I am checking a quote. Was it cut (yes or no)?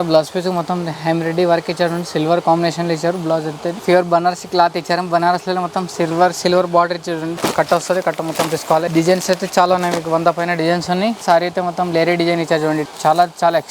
yes